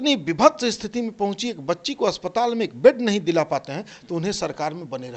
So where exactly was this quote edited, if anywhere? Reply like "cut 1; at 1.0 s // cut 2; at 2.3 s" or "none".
none